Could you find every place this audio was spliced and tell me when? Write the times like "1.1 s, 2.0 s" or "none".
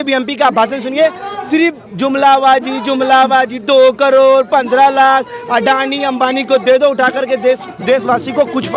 none